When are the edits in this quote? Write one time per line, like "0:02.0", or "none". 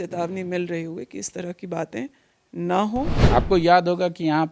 0:03.2